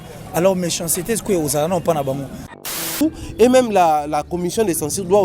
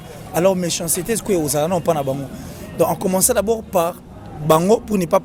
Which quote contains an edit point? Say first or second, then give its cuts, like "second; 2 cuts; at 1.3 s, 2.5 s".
first; 1 cut; at 2.8 s